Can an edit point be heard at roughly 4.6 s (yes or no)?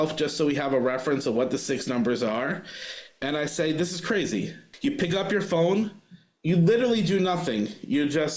yes